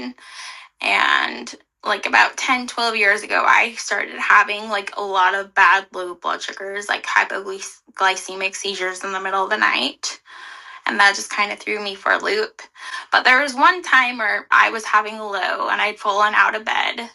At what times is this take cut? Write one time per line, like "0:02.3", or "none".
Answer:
0:14.5